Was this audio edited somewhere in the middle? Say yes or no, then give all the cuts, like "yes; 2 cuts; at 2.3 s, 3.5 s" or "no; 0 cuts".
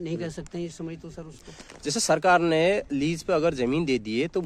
no; 0 cuts